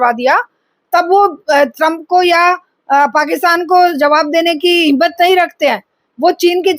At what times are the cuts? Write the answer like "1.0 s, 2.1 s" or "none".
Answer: none